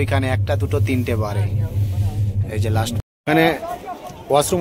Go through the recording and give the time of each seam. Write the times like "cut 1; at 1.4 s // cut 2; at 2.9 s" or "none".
cut 1; at 3.0 s